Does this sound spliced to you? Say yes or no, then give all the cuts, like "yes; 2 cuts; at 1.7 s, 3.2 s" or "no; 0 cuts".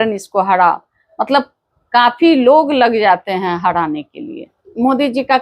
yes; 1 cut; at 4.5 s